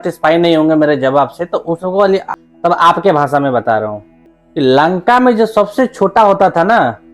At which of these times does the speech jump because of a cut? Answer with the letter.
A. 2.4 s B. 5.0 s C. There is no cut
A